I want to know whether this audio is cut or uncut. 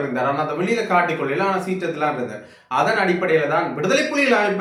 uncut